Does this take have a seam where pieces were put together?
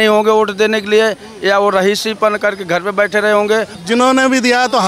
yes; 1 cut; at 3.8 s

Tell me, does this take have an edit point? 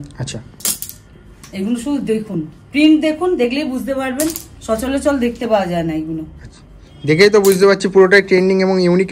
no; 0 cuts

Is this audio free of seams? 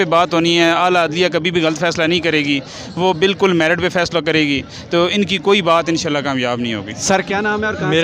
yes; 0 cuts

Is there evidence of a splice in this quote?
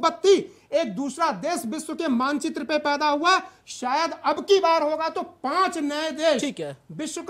no; 0 cuts

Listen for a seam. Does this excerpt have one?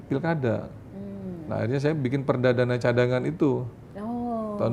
no; 0 cuts

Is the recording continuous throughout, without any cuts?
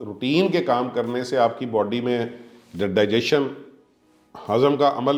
yes; 0 cuts

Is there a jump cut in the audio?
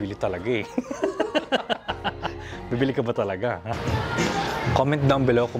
yes; 1 cut; at 3.5 s

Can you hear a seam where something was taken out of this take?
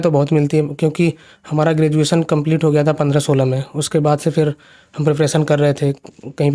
no; 0 cuts

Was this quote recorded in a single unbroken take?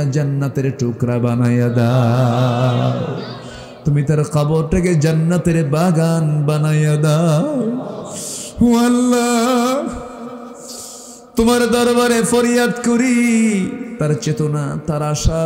no; 1 cut; at 13.8 s

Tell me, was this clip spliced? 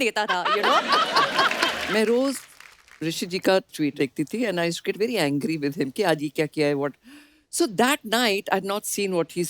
yes; 1 cut; at 1.8 s

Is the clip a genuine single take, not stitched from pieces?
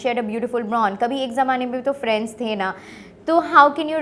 yes; 0 cuts

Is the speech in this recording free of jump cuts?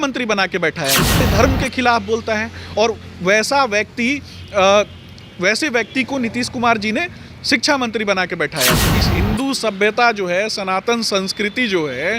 no; 2 cuts; at 1.2 s, 8.9 s

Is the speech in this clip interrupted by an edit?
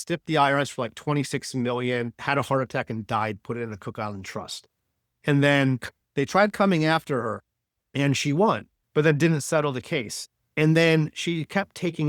no; 0 cuts

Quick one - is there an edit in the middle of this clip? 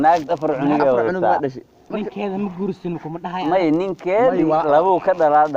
no; 0 cuts

